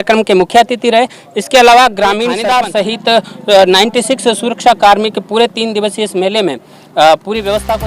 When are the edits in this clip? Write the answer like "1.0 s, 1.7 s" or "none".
2.3 s